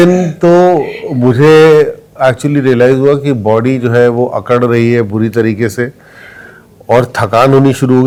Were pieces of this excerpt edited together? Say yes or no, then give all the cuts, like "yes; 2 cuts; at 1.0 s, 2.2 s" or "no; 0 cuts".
no; 0 cuts